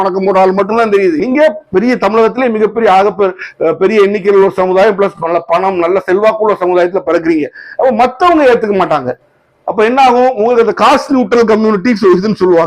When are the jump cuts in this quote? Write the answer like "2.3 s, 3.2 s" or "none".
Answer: 1.2 s